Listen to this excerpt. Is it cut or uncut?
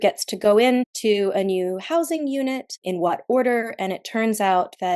cut